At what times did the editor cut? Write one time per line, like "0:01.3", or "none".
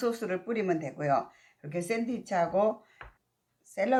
none

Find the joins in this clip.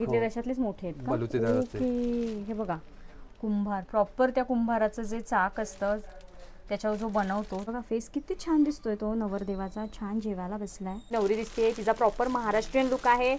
0:07.7
0:11.1

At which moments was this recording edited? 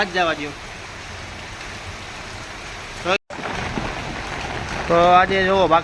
0:03.2

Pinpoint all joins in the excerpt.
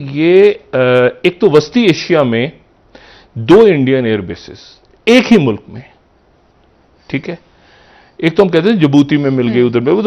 none

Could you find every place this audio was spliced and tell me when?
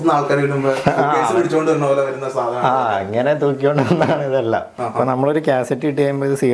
0:04.8

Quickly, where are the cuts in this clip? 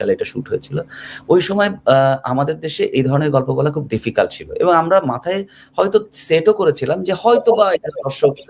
none

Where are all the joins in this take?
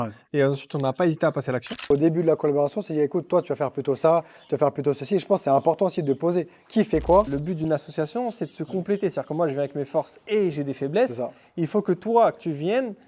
0:01.9
0:07.3

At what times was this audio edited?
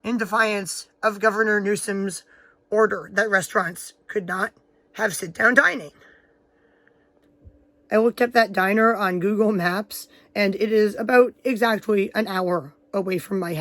0:07.2

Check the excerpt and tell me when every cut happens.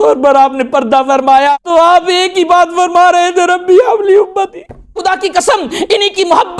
0:01.5
0:05.0

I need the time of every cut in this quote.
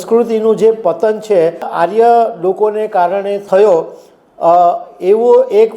0:01.7
0:03.4

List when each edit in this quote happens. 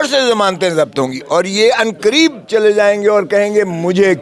none

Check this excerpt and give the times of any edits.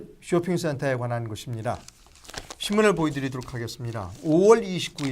0:01.3

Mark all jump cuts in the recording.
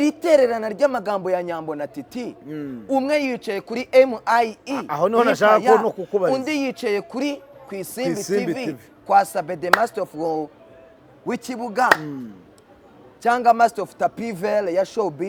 none

